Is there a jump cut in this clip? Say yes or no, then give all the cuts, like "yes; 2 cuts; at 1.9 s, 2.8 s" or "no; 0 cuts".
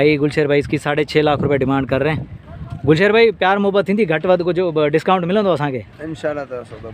no; 0 cuts